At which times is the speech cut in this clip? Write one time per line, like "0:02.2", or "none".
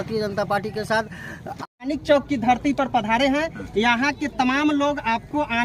0:01.6